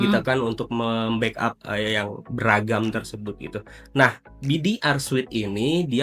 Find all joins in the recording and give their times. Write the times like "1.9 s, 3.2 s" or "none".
none